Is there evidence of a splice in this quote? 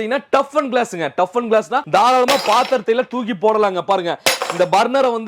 yes; 1 cut; at 1.8 s

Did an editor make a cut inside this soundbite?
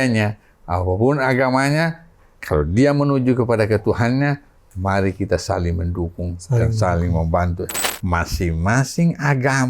yes; 1 cut; at 7.9 s

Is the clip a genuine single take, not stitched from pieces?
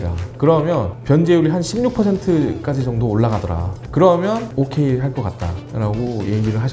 no; 1 cut; at 4.5 s

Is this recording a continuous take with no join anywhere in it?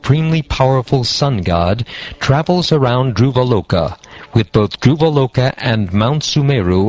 yes; 0 cuts

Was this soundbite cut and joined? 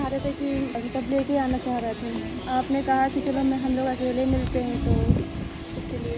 yes; 2 cuts; at 0.8 s, 2.3 s

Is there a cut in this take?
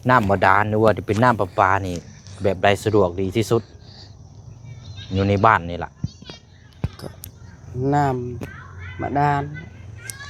no; 0 cuts

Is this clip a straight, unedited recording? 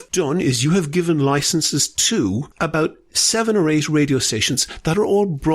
no; 1 cut; at 2.5 s

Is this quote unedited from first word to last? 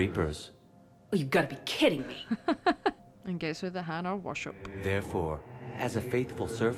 yes; 0 cuts

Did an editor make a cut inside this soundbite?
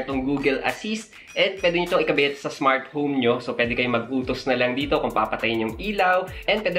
no; 0 cuts

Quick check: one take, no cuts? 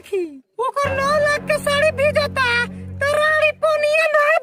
yes; 0 cuts

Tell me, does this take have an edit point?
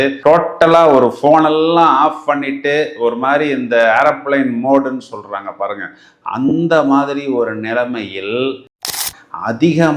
yes; 1 cut; at 9.0 s

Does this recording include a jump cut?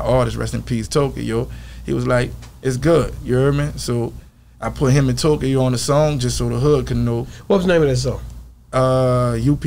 no; 0 cuts

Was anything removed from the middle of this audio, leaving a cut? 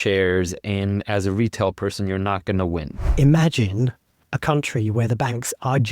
yes; 1 cut; at 3.0 s

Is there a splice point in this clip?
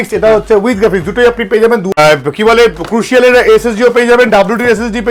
yes; 1 cut; at 2.0 s

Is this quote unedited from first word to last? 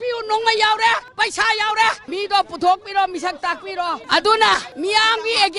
no; 3 cuts; at 1.1 s, 2.0 s, 4.0 s

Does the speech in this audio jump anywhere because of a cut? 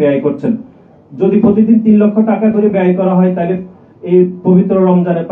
no; 0 cuts

